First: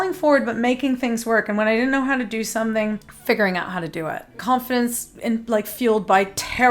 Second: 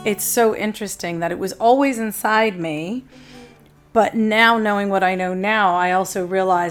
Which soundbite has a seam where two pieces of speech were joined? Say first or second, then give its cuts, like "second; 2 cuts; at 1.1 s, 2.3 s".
first; 2 cuts; at 3.1 s, 4.4 s